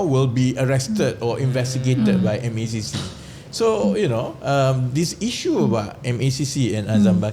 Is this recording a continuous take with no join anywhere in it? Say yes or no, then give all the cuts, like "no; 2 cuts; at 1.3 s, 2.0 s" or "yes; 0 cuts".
yes; 0 cuts